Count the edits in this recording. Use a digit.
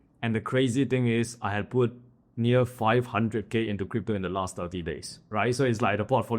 1